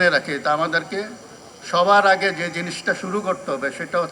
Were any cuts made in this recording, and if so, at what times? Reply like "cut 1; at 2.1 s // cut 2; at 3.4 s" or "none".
none